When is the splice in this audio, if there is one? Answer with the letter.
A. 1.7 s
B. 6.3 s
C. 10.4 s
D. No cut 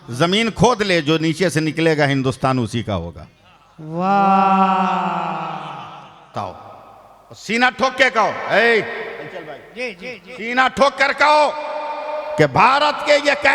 B